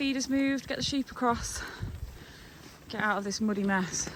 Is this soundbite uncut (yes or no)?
yes